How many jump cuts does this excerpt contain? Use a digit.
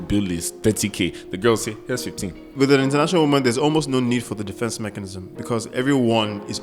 1